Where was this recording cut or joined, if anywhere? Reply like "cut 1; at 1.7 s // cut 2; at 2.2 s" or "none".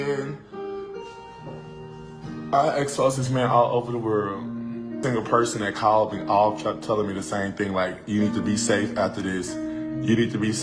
cut 1; at 5.0 s